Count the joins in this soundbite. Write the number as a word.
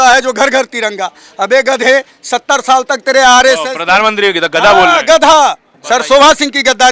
one